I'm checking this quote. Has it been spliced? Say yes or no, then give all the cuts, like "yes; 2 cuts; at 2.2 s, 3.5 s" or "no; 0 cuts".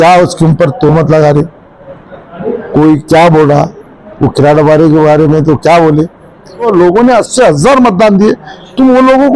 yes; 1 cut; at 6.6 s